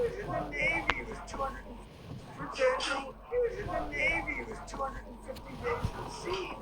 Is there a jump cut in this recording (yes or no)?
yes